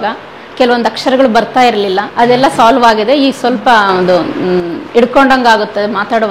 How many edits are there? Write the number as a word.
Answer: one